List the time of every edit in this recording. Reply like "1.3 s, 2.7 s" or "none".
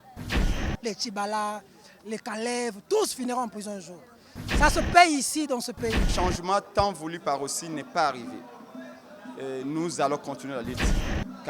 6.1 s